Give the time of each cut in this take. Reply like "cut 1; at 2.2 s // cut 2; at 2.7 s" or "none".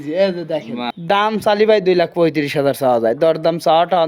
cut 1; at 0.9 s